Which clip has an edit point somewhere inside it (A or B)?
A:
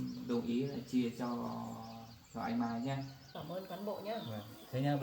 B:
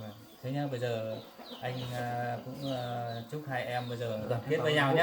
A